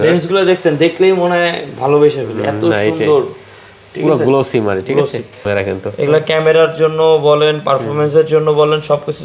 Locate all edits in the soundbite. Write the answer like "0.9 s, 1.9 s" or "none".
5.5 s